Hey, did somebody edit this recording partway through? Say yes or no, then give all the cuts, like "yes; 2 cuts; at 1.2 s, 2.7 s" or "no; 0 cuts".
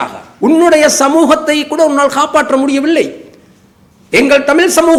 no; 0 cuts